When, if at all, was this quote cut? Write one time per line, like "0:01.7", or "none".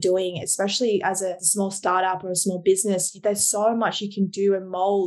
0:01.4

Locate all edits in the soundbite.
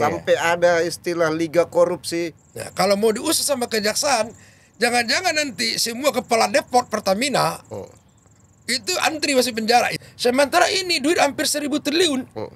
0:02.4
0:10.0

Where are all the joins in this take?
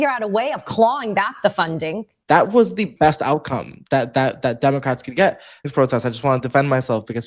0:02.1
0:02.9
0:05.7

